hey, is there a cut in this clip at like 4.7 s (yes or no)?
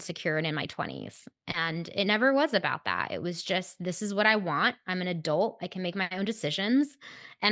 no